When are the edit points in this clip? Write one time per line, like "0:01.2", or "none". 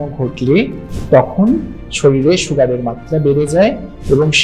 none

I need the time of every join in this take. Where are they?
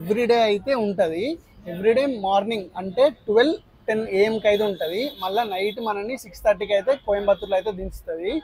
none

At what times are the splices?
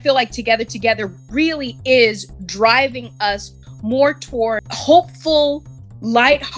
0:04.7

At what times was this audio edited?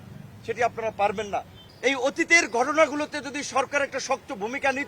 0:01.6

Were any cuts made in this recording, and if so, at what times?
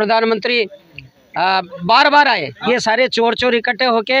0:02.5

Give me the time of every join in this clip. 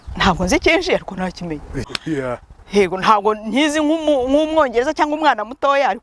0:01.8

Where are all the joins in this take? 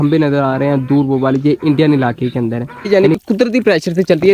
0:02.9

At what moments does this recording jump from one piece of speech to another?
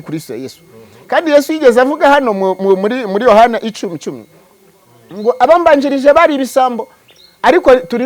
none

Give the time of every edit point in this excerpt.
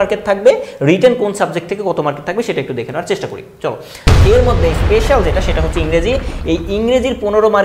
0:04.0

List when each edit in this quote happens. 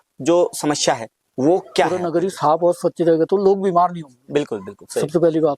0:02.0

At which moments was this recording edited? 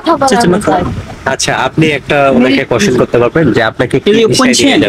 none

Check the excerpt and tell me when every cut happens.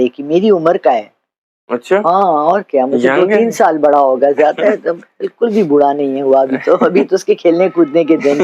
none

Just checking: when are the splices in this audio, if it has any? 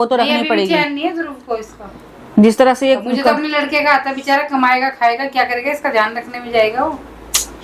none

